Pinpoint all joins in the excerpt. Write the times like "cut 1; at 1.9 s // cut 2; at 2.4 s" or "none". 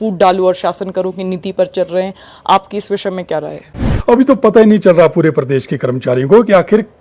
cut 1; at 3.9 s